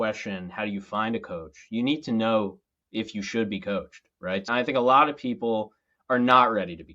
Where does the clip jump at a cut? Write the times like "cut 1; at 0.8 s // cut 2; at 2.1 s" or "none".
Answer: cut 1; at 4.5 s